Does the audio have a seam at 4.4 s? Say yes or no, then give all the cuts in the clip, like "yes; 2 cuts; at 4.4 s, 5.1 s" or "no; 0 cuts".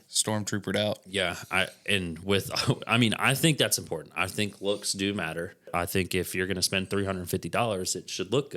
no; 1 cut; at 5.7 s